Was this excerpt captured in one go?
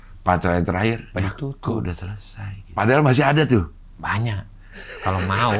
no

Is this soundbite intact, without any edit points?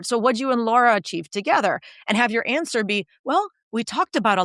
yes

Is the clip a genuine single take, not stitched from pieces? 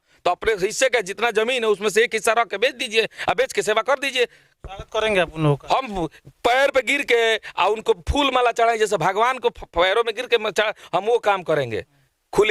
yes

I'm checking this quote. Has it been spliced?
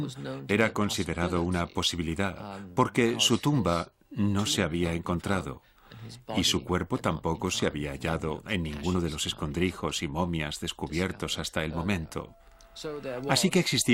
no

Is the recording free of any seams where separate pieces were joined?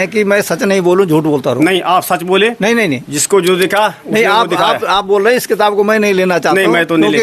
yes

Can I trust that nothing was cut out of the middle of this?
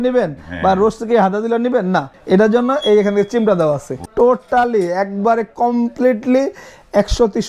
no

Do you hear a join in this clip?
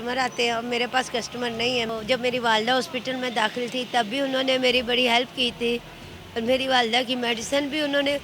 yes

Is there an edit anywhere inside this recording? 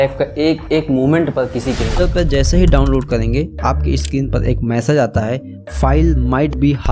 yes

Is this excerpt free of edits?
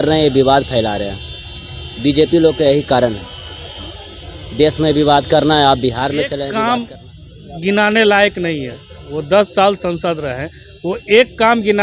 no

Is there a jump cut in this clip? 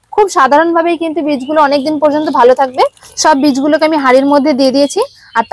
yes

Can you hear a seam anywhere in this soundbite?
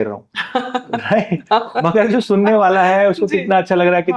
no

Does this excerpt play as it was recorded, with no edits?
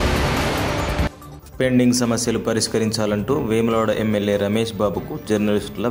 no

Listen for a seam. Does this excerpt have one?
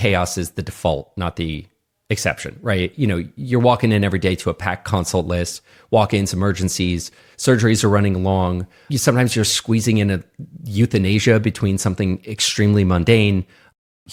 no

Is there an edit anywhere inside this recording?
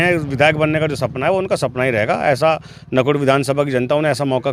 no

